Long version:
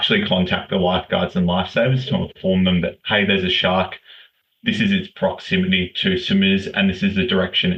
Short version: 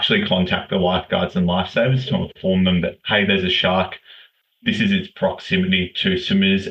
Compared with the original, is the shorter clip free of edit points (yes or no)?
yes